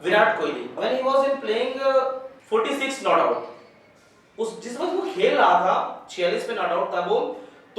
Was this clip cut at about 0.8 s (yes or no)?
yes